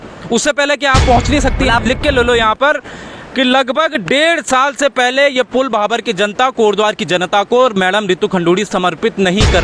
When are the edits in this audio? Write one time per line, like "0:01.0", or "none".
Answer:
0:01.8